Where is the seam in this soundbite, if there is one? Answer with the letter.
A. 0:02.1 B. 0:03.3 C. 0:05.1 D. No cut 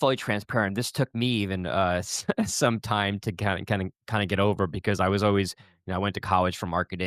D